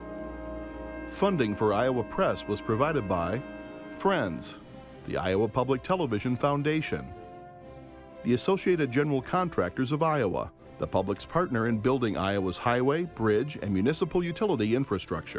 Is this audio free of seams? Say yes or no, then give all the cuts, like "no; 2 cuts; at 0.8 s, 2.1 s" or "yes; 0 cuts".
no; 1 cut; at 1.1 s